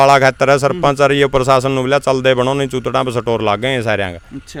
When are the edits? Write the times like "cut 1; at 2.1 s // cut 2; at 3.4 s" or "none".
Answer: none